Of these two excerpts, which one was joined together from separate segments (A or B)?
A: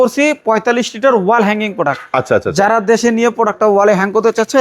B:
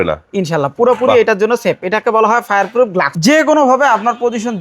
B